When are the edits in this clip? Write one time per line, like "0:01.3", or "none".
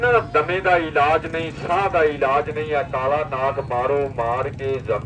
none